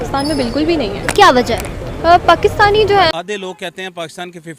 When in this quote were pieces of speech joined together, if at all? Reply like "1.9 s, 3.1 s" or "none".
3.1 s